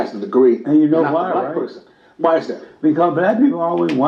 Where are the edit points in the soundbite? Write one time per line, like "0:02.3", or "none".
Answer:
none